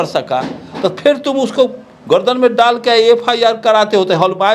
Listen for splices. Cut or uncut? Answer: uncut